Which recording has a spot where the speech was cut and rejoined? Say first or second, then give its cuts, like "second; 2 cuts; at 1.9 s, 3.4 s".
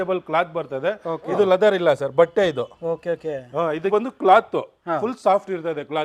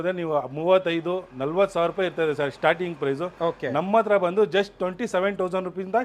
first; 2 cuts; at 1.3 s, 3.9 s